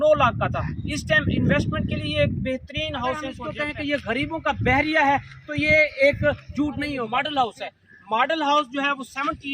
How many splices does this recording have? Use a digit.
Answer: 2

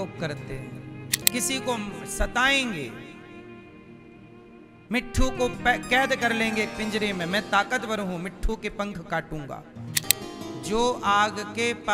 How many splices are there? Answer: 2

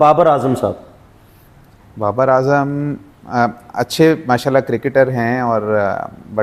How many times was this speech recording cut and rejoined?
0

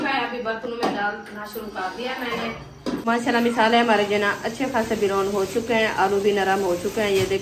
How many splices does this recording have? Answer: 1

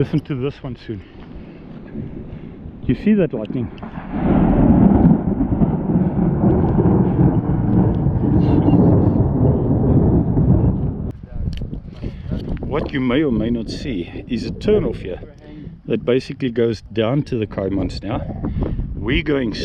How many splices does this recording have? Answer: 1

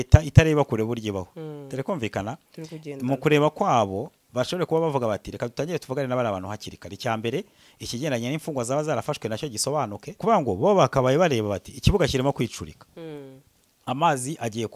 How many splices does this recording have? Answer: 1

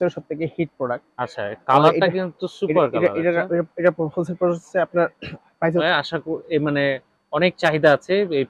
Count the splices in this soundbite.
1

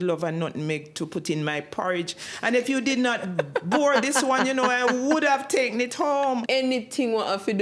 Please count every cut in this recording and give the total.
1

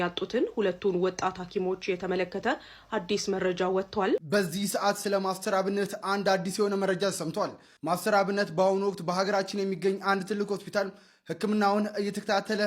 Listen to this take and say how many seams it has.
1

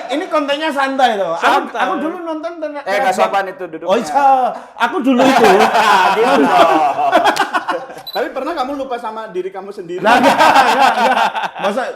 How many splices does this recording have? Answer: 1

